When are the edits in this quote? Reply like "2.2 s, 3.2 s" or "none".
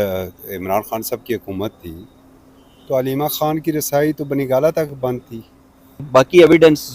5.9 s